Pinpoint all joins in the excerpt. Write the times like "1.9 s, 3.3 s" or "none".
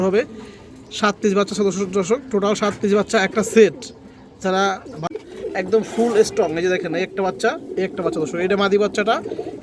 5.1 s